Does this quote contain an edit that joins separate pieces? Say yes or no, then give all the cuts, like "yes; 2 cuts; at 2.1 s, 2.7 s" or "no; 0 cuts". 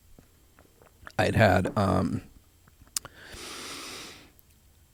no; 0 cuts